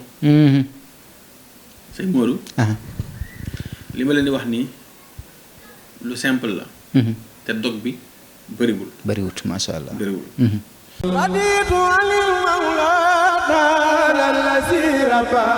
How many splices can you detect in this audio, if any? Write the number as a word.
one